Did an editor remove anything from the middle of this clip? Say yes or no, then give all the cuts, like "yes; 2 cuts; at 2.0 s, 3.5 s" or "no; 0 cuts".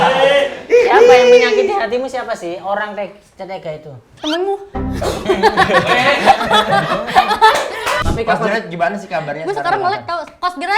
yes; 1 cut; at 8.0 s